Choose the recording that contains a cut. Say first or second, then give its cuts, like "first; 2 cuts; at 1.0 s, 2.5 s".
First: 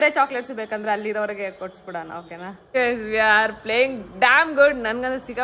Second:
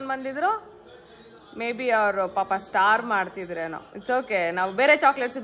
first; 1 cut; at 2.8 s